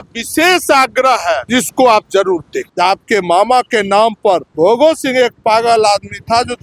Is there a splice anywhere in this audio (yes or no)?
yes